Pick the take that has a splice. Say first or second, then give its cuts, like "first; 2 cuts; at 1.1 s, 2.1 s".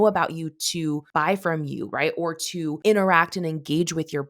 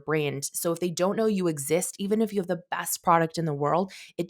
first; 2 cuts; at 1.0 s, 2.8 s